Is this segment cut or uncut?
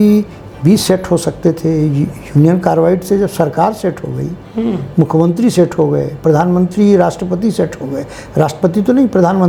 uncut